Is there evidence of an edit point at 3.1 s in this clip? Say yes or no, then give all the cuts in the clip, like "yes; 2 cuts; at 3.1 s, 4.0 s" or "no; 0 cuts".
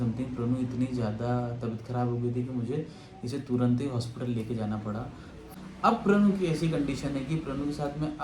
no; 1 cut; at 5.5 s